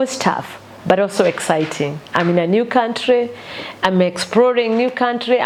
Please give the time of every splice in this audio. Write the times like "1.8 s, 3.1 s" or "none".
none

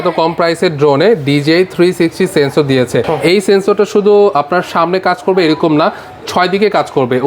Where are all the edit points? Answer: none

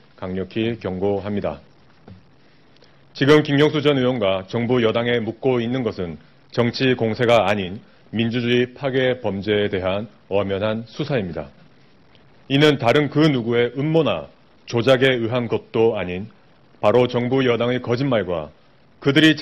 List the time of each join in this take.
none

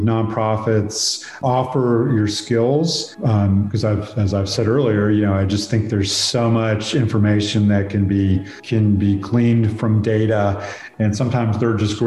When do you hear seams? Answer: 1.4 s, 8.6 s, 10.8 s

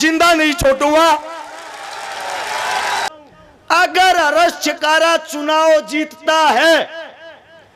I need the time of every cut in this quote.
3.1 s

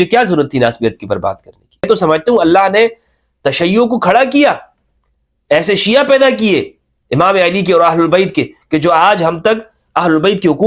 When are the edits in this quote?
1.8 s

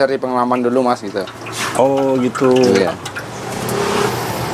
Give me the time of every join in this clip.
none

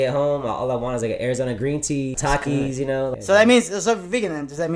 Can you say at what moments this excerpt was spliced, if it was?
2.1 s, 3.1 s

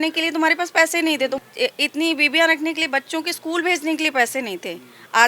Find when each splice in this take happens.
1.4 s

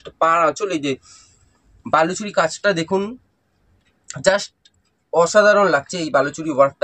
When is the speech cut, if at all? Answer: none

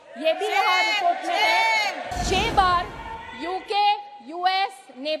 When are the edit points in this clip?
2.1 s

